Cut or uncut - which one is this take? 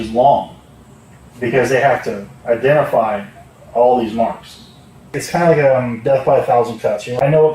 cut